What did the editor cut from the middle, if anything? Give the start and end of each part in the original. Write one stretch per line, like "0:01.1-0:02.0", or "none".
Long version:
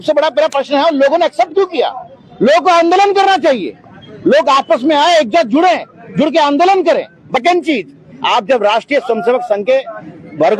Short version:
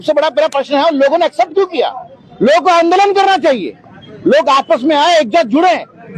none